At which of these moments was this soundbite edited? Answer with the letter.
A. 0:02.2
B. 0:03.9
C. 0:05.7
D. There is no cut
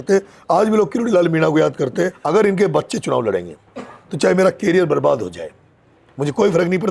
A